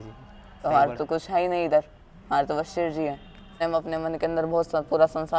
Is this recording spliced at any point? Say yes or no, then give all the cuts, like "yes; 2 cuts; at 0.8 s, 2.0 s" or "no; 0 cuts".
yes; 1 cut; at 3.6 s